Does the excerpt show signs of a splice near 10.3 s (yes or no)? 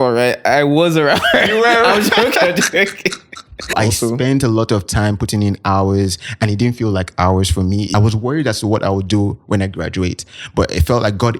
no